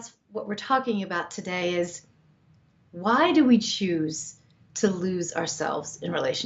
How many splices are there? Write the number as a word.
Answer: zero